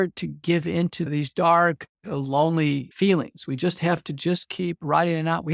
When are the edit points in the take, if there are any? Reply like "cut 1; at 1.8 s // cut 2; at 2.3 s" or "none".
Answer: cut 1; at 1.1 s // cut 2; at 2.9 s